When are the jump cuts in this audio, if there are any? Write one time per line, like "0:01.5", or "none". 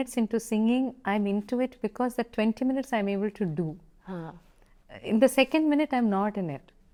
none